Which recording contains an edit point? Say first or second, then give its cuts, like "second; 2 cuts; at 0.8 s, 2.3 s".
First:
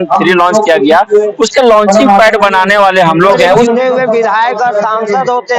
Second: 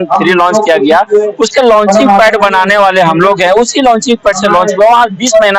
first; 1 cut; at 3.7 s